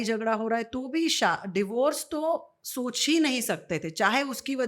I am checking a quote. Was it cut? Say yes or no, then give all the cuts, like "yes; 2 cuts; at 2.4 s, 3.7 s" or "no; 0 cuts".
no; 0 cuts